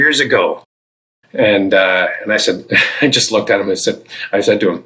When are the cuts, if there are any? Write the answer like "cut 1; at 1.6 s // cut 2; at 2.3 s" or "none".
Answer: none